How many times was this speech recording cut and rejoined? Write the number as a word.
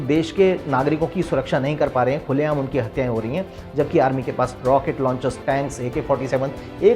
one